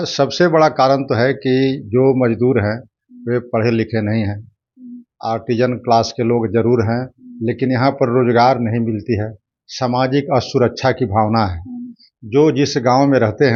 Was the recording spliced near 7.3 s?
no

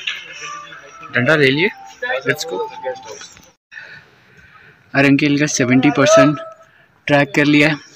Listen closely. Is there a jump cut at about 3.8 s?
yes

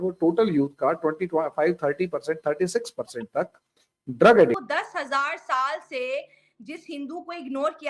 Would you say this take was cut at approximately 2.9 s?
no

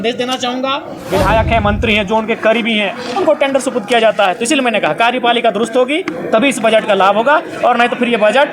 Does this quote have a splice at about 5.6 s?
no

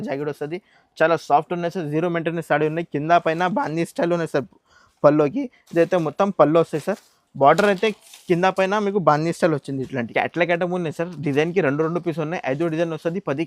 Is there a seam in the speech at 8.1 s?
no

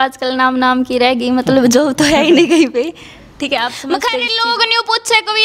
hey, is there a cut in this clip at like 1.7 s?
no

